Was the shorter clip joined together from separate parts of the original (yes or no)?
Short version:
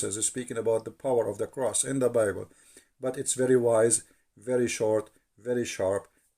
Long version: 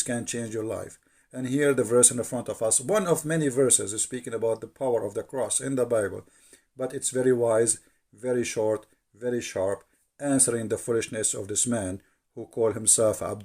no